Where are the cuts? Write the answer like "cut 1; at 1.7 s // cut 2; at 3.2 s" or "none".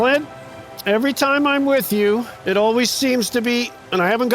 cut 1; at 2.3 s

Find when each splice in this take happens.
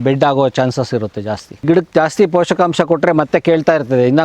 cut 1; at 1.6 s

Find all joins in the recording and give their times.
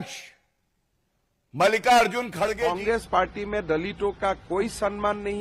cut 1; at 2.6 s

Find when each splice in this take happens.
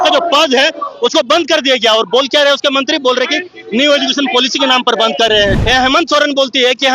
cut 1; at 5.6 s

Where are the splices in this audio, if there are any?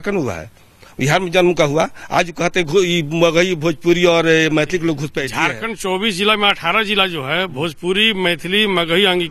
cut 1; at 5.2 s

